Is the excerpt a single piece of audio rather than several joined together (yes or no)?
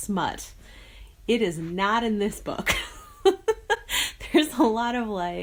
yes